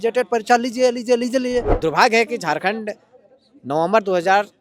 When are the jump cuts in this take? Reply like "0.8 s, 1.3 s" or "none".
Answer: 1.7 s